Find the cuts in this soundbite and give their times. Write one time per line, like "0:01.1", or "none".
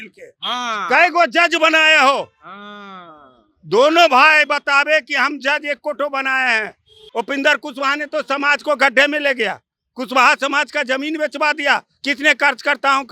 0:07.0